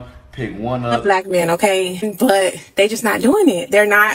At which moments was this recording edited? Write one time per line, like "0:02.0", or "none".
0:01.0